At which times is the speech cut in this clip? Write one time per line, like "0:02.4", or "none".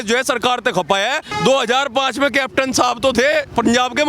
0:01.3